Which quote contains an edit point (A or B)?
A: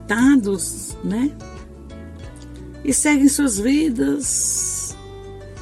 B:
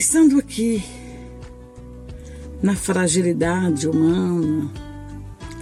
A